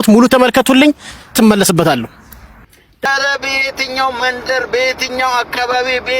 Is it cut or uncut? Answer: cut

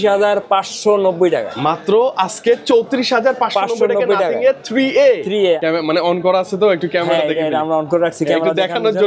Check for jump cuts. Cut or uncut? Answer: cut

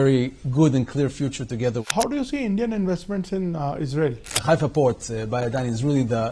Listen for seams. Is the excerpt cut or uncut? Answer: cut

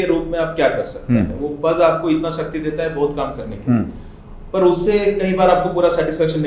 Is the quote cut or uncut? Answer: uncut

